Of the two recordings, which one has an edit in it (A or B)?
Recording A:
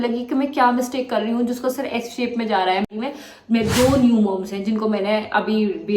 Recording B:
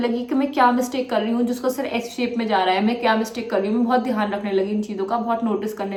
A